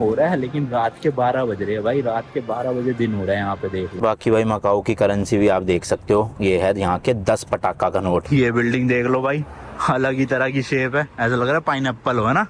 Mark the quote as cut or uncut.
cut